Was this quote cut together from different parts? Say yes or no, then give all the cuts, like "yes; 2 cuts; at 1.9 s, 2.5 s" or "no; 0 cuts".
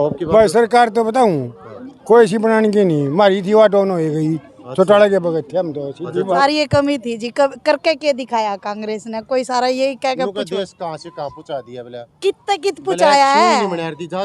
yes; 1 cut; at 6.4 s